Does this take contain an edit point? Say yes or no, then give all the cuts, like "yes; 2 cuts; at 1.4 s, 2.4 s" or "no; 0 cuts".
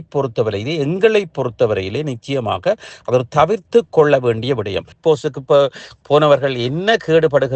yes; 1 cut; at 4.9 s